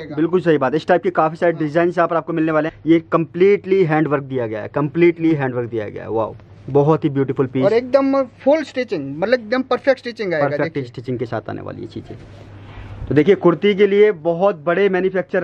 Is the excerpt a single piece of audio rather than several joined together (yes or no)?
no